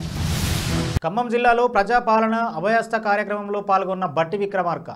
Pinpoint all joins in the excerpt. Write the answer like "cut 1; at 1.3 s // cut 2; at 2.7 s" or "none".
cut 1; at 1.0 s